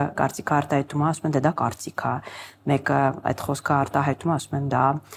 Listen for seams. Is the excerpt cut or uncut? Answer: uncut